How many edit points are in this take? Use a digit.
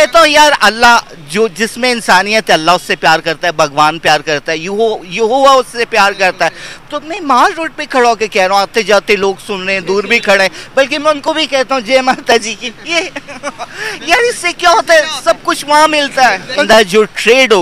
1